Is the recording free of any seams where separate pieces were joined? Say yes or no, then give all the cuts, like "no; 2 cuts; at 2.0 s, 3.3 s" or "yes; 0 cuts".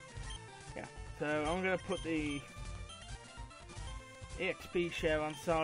no; 1 cut; at 4.6 s